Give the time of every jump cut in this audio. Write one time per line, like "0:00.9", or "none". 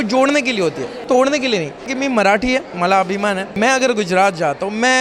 0:01.0
0:01.9
0:03.5